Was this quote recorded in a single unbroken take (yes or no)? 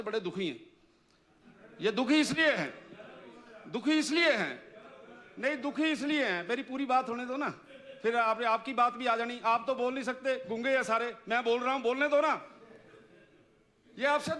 yes